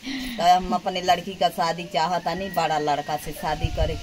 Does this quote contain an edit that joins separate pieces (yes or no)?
no